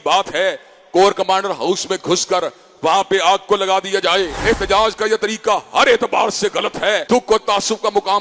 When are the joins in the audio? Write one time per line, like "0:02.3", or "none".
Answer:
0:04.3
0:07.0